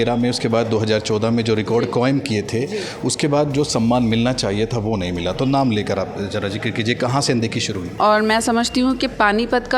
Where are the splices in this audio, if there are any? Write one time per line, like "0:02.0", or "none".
0:07.8